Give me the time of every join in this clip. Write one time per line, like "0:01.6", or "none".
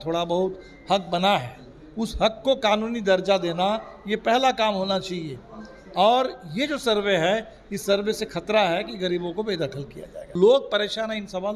0:10.3